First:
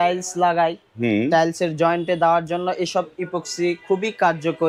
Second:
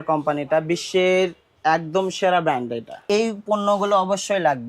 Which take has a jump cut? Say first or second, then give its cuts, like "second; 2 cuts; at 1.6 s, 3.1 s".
second; 1 cut; at 3.0 s